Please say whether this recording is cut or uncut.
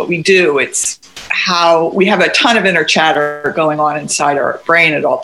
uncut